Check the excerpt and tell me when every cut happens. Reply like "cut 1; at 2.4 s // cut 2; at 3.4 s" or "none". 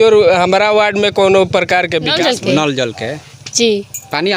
cut 1; at 2.1 s